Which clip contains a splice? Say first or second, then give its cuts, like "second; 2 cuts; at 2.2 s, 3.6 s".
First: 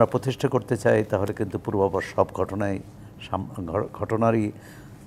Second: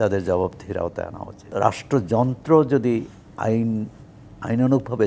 second; 1 cut; at 1.4 s